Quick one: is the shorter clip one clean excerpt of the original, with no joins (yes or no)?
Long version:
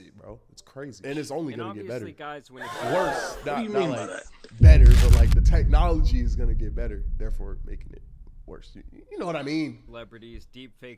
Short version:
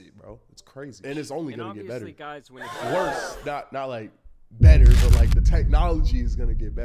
yes